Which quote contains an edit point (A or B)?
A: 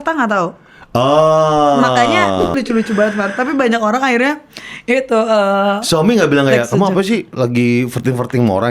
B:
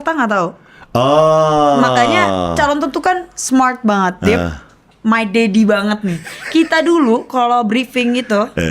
A